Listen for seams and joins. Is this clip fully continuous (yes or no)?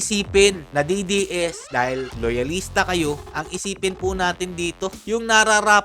no